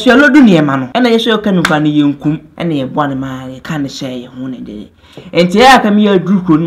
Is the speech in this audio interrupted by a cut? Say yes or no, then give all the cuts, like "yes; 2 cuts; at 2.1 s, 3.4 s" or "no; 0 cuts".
yes; 3 cuts; at 0.9 s, 2.5 s, 3.5 s